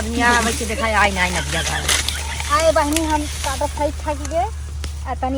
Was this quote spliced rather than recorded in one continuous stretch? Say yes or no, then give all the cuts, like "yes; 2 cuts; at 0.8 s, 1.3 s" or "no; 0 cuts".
no; 0 cuts